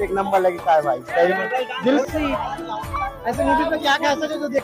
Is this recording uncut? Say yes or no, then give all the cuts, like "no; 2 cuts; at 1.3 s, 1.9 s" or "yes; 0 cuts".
no; 1 cut; at 2.0 s